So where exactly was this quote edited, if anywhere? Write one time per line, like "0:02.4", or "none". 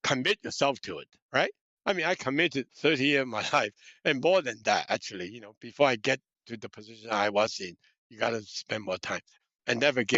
0:09.3